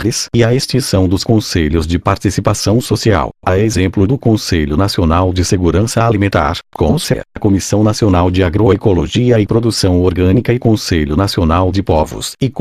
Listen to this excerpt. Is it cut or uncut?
cut